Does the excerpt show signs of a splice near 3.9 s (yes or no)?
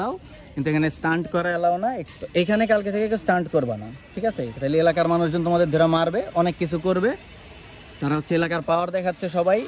no